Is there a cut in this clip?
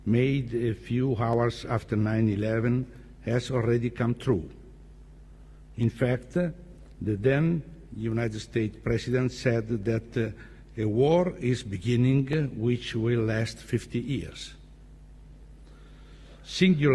no; 0 cuts

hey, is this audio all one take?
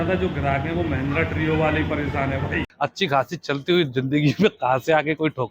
no; 1 cut; at 2.6 s

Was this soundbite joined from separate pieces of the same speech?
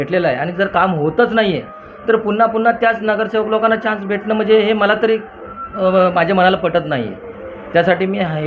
no; 0 cuts

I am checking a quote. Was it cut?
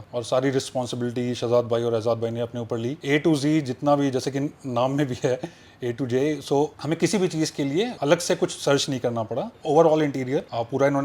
yes; 2 cuts; at 3.0 s, 7.9 s

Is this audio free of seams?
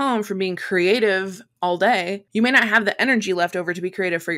no; 1 cut; at 2.2 s

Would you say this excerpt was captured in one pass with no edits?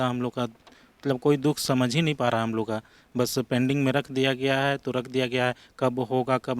yes; 0 cuts

